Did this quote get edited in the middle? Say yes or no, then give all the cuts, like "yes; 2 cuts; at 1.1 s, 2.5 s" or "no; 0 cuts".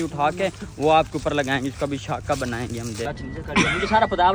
yes; 1 cut; at 3.1 s